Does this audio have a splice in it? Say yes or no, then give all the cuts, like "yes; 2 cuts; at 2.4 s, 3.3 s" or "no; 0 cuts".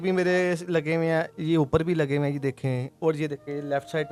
no; 0 cuts